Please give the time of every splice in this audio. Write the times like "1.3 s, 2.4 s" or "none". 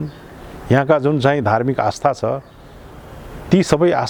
none